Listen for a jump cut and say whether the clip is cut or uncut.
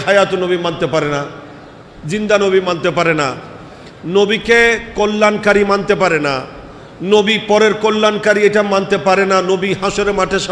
uncut